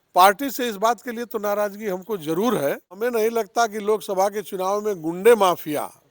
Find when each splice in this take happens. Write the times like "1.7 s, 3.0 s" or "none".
3.0 s